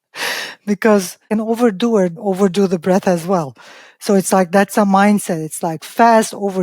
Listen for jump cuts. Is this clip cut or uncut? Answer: cut